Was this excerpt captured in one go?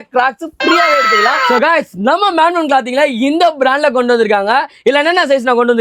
no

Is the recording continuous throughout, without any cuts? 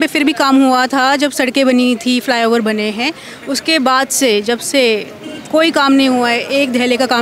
yes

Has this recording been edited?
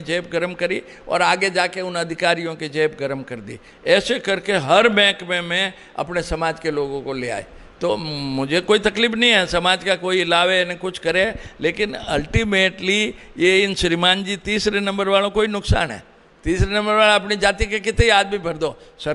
no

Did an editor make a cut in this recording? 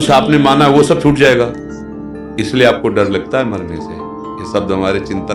no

